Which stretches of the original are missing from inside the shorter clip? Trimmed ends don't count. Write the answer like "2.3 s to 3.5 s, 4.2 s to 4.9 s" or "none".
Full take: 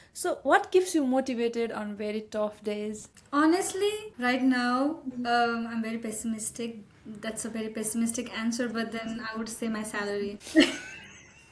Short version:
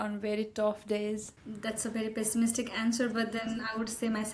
3.1 s to 7.0 s